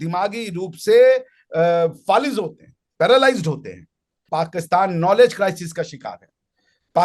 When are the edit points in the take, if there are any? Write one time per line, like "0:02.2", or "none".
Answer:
0:04.3